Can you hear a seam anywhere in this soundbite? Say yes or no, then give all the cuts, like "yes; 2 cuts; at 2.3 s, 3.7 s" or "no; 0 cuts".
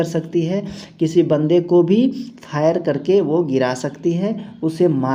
no; 0 cuts